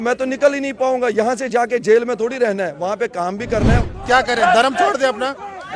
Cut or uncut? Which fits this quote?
cut